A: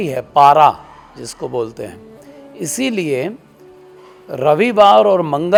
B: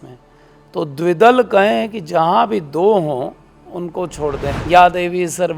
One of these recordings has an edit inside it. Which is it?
B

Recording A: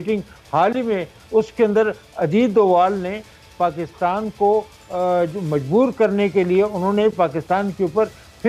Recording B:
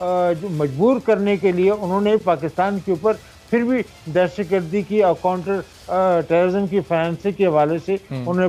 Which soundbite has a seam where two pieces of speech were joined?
A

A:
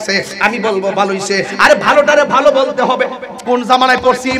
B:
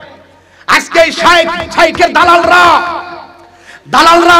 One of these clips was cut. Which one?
A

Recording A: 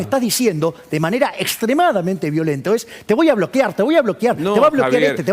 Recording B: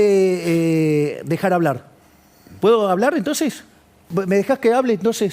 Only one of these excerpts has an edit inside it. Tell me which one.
B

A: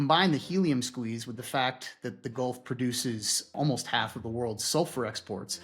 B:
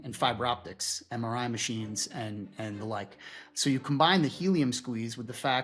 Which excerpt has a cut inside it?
A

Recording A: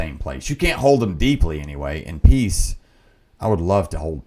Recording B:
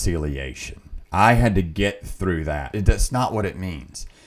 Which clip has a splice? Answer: B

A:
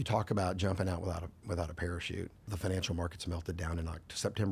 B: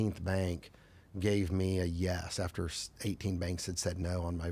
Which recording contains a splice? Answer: A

